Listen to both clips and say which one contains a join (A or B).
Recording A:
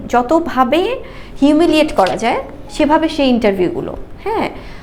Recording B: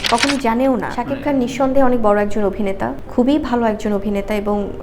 B